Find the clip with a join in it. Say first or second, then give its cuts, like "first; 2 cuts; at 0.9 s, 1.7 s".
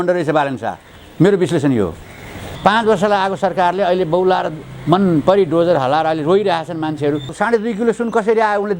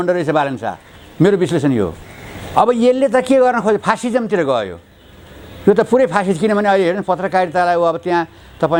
first; 2 cuts; at 2.4 s, 7.3 s